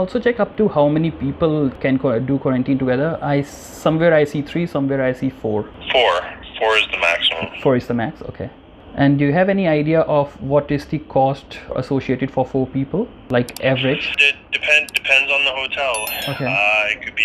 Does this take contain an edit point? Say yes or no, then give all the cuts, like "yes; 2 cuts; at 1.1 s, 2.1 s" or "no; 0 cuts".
no; 0 cuts